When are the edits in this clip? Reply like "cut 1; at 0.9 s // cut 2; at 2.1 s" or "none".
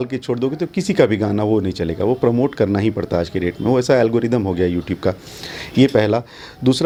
none